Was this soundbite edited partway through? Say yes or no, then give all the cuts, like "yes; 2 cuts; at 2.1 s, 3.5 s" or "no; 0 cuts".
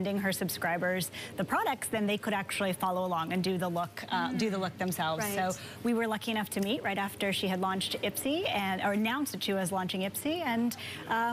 yes; 1 cut; at 8.0 s